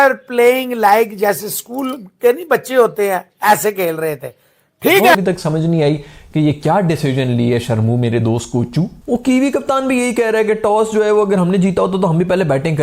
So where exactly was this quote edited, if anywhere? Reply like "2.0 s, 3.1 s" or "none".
5.1 s